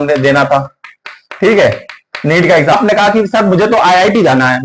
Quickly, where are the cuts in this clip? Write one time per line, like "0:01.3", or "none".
0:02.8